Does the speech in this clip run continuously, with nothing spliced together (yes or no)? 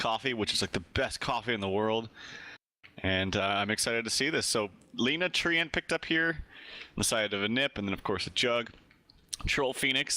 no